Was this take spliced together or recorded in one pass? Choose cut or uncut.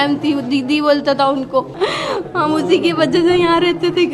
cut